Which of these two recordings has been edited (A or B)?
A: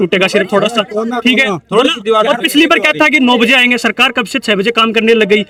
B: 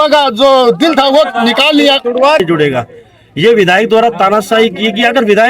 B